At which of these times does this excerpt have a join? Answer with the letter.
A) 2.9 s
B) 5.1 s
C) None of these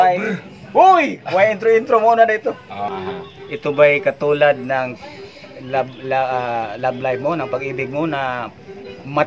A